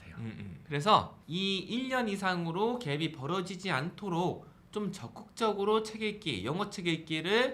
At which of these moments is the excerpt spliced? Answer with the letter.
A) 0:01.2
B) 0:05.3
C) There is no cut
A